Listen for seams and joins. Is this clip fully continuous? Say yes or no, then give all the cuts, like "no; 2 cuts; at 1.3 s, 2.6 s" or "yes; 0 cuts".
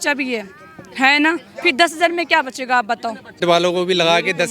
no; 1 cut; at 3.4 s